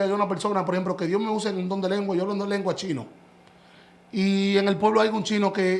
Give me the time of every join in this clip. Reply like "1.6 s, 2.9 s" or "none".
none